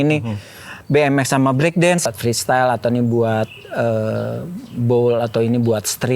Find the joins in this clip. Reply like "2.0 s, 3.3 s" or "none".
2.1 s